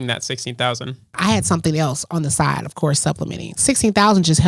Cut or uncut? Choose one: cut